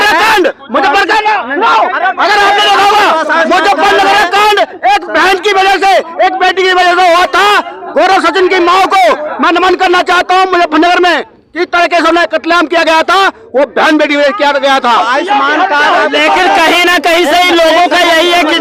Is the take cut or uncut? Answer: uncut